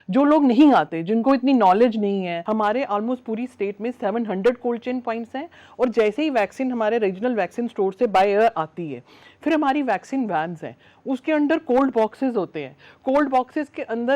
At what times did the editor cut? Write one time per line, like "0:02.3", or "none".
0:02.4